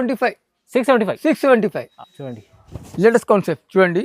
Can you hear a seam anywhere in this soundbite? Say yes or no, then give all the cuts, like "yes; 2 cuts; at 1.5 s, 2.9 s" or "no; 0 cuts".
yes; 1 cut; at 1.9 s